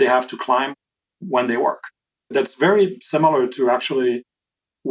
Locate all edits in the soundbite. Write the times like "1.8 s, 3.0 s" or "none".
2.3 s